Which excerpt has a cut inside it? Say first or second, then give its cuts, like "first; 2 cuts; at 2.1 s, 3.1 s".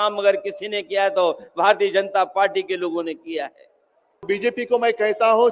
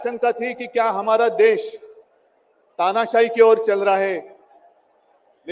first; 1 cut; at 4.2 s